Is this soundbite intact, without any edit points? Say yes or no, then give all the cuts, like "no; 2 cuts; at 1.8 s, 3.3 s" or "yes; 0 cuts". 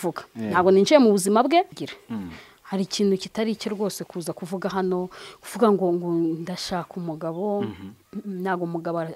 no; 1 cut; at 1.7 s